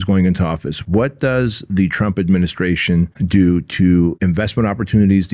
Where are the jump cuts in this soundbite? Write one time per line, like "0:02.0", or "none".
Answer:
0:03.2
0:04.2

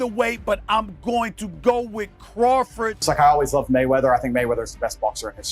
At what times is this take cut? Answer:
0:03.0

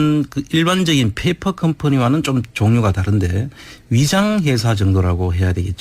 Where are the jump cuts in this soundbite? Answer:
none

